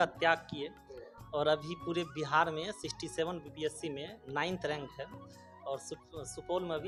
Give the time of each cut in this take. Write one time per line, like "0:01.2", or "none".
none